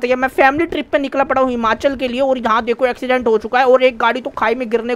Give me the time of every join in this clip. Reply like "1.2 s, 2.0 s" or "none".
none